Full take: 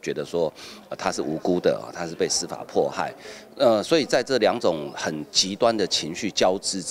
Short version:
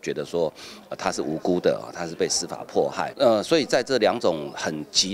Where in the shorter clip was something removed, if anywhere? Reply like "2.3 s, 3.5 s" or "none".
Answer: 3.1 s